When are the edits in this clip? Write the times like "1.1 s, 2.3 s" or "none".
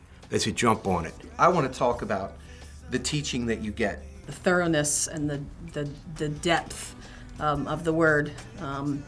4.1 s